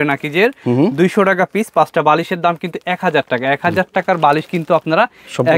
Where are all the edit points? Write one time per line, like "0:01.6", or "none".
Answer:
none